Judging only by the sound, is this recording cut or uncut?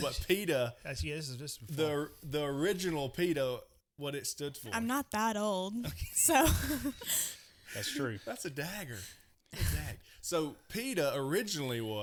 uncut